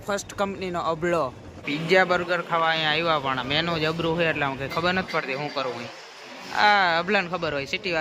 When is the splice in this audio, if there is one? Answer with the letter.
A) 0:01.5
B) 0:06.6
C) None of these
A